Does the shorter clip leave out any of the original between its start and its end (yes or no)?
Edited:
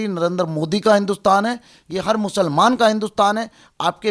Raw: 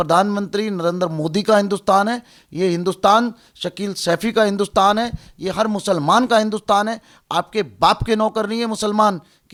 yes